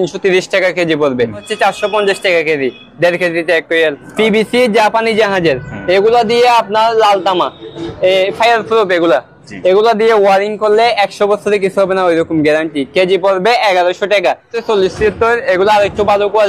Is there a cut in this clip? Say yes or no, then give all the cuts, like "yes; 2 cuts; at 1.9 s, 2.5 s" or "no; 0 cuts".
yes; 3 cuts; at 1.5 s, 4.0 s, 14.6 s